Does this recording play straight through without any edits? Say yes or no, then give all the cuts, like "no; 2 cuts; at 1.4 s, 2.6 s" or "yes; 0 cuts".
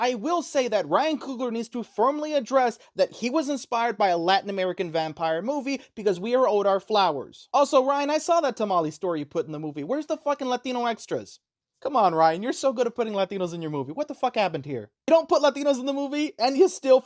yes; 0 cuts